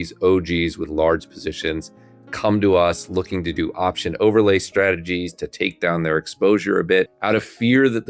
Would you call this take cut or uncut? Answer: cut